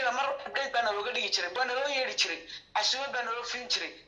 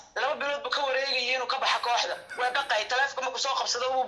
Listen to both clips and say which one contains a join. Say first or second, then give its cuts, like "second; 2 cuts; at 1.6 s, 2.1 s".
first; 1 cut; at 1.5 s